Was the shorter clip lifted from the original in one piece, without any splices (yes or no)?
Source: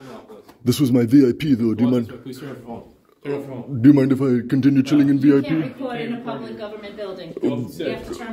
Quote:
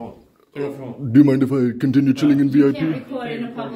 yes